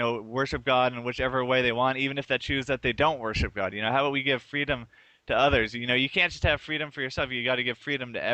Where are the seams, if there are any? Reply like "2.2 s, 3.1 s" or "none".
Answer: 2.4 s